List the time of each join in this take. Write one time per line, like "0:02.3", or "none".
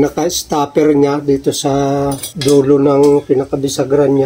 0:02.3

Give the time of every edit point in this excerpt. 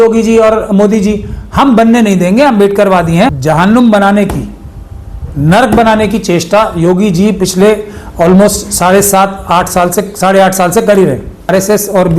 0:03.4
0:11.5

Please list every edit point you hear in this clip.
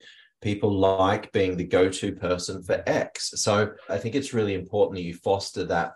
0:03.9

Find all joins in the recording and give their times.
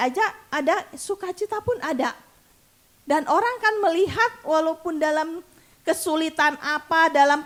none

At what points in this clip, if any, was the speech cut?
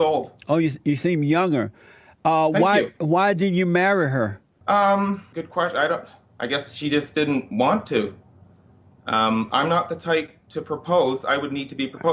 0:04.5
0:05.3
0:06.2

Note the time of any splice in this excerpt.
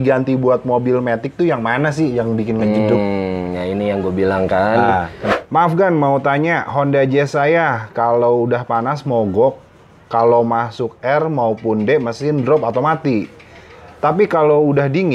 0:05.2

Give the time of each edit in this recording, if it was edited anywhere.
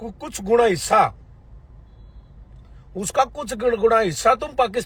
none

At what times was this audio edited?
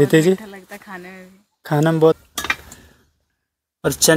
0:02.2

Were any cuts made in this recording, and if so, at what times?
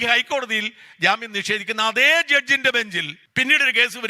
0:03.2

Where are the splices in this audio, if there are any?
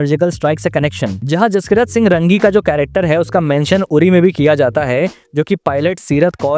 none

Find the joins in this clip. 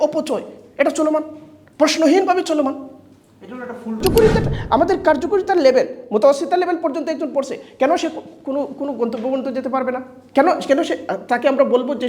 0:04.0

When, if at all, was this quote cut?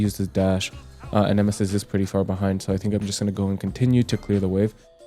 none

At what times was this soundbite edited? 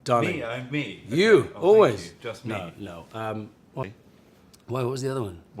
0:03.8

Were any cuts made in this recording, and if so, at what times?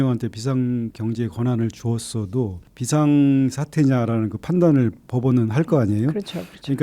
0:00.9
0:02.7

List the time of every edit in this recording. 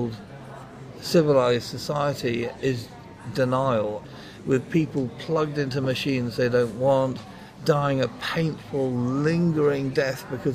0:04.1

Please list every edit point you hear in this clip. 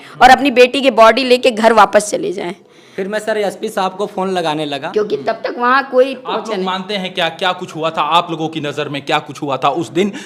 none

